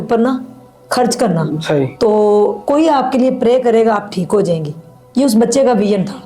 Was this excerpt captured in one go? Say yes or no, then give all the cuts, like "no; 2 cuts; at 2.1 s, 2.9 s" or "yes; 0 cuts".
yes; 0 cuts